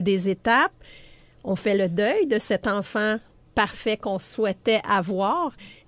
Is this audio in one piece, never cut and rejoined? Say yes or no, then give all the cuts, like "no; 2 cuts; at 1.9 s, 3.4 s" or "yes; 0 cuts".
yes; 0 cuts